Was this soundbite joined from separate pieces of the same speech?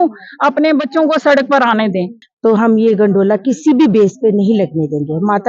yes; 1 cut; at 2.2 s

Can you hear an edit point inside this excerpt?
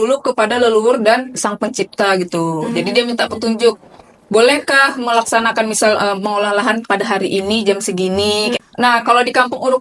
yes; 1 cut; at 8.6 s

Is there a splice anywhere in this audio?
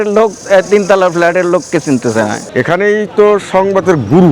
yes; 1 cut; at 2.4 s

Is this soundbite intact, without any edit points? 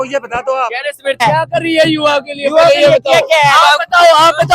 no; 1 cut; at 1.2 s

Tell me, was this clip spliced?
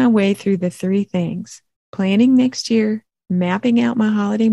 no; 0 cuts

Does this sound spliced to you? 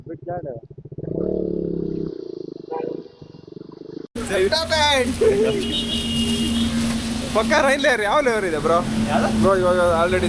yes; 1 cut; at 4.2 s

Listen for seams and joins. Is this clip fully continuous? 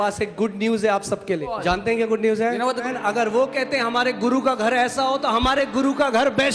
no; 2 cuts; at 1.5 s, 2.9 s

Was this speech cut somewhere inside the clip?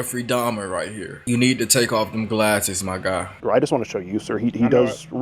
yes; 2 cuts; at 1.1 s, 3.4 s

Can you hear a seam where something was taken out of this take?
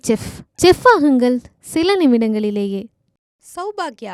no; 0 cuts

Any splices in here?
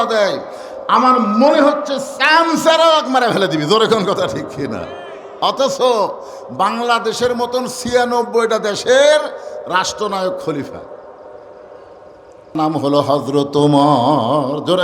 yes; 1 cut; at 12.6 s

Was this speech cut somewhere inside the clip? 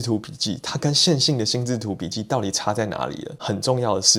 no; 0 cuts

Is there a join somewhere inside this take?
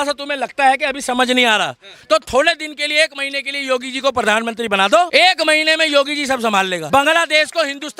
yes; 2 cuts; at 5.1 s, 6.8 s

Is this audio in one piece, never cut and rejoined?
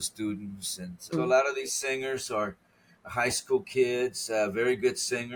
yes; 0 cuts

